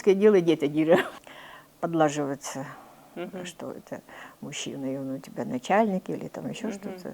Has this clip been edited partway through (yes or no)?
yes